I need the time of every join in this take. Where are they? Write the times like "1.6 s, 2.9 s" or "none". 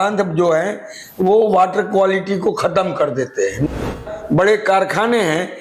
3.9 s